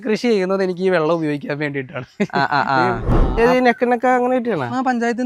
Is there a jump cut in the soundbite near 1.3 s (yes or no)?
no